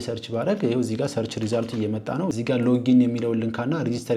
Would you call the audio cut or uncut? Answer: cut